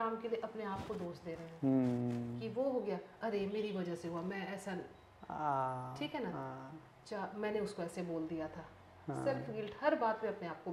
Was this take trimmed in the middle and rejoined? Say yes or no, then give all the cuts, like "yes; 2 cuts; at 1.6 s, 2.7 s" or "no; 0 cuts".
no; 0 cuts